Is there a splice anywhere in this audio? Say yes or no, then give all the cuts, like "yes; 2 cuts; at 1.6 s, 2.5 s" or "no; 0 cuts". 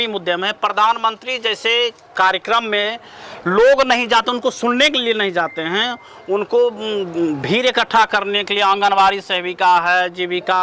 no; 0 cuts